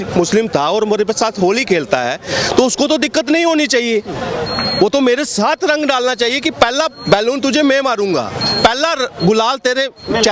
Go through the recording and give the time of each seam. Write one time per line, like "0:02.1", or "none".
none